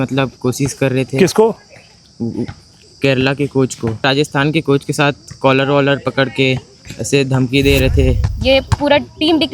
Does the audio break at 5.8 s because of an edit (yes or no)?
no